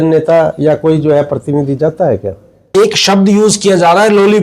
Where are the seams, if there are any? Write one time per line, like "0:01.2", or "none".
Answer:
0:02.7